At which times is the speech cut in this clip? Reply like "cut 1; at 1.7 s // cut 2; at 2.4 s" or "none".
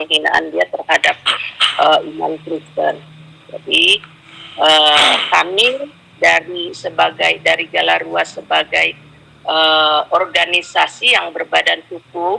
none